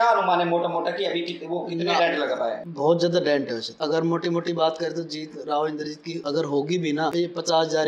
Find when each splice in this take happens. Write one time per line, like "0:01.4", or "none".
0:02.7
0:03.6
0:06.1
0:07.1